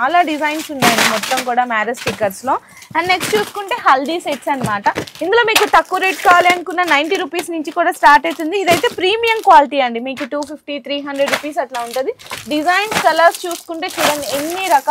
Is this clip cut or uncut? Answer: uncut